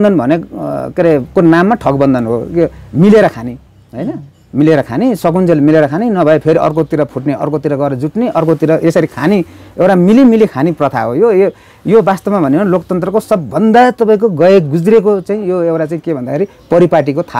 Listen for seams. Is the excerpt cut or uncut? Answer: uncut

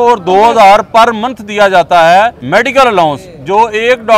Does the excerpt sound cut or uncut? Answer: cut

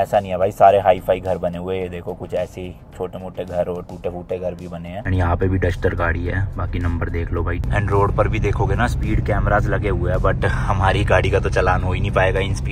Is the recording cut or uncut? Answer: cut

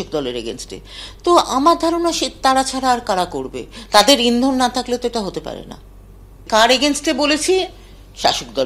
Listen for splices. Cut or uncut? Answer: uncut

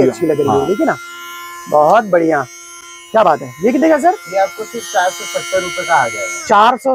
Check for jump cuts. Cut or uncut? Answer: uncut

